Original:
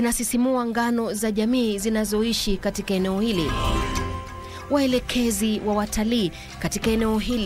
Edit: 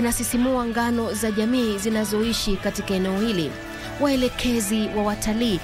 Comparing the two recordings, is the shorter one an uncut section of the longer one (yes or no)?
no